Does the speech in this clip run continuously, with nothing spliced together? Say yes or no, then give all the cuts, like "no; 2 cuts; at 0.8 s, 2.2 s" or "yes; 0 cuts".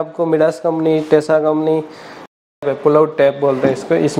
no; 1 cut; at 2.6 s